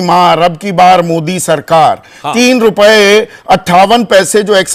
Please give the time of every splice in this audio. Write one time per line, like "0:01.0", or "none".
none